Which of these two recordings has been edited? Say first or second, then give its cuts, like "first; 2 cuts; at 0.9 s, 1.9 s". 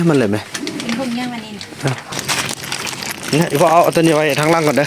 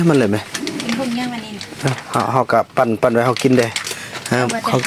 first; 1 cut; at 2.0 s